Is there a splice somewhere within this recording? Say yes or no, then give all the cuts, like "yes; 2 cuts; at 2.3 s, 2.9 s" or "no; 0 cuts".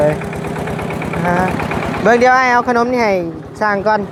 no; 0 cuts